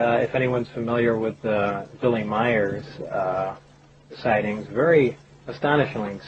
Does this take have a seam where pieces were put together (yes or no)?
no